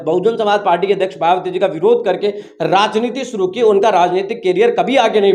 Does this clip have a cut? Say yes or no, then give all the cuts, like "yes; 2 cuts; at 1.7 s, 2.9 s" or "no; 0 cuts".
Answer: no; 0 cuts